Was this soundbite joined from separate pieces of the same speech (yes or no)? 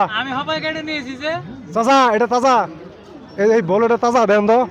no